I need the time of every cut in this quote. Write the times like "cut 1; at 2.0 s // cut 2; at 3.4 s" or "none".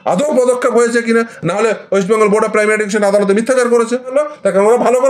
cut 1; at 4.1 s

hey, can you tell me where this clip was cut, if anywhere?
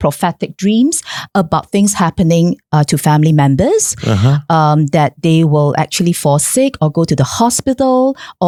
none

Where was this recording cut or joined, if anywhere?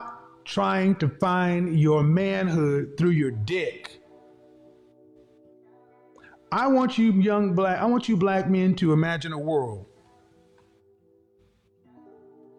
none

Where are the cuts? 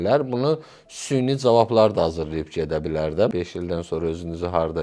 cut 1; at 3.3 s

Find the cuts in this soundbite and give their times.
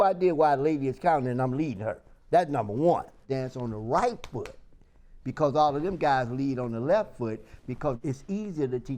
cut 1; at 3.3 s // cut 2; at 8.0 s

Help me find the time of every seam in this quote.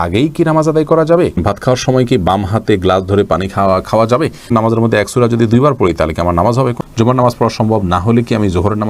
cut 1; at 1.4 s // cut 2; at 4.5 s // cut 3; at 6.8 s

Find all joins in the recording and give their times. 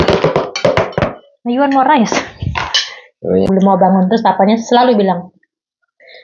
cut 1; at 3.5 s

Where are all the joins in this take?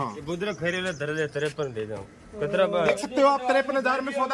cut 1; at 3.0 s

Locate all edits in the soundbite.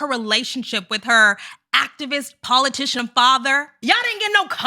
cut 1; at 3.7 s

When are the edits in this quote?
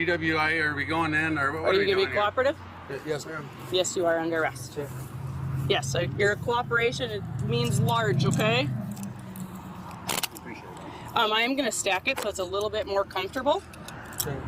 none

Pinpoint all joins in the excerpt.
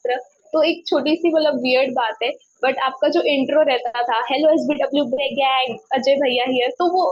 none

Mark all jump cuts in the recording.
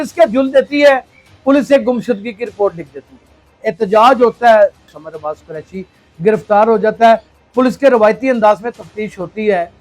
cut 1; at 3.6 s // cut 2; at 4.8 s // cut 3; at 7.4 s

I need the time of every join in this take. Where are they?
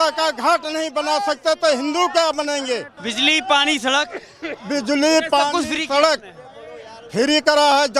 none

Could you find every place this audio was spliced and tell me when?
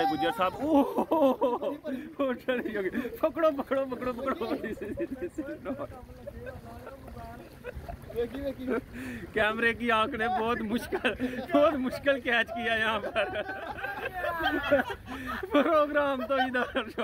none

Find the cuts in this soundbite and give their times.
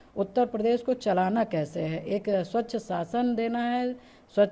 none

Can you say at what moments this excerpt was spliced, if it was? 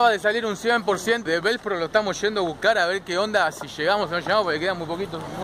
cut 1; at 1.2 s

